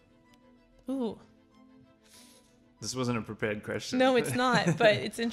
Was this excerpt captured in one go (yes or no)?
yes